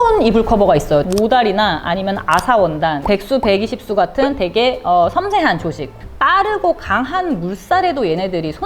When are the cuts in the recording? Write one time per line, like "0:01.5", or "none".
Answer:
0:01.0
0:05.9